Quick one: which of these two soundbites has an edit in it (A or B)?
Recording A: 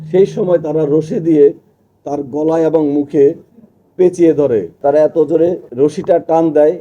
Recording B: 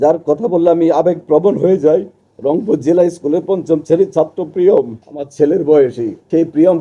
A